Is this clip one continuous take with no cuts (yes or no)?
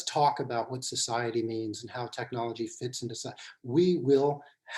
no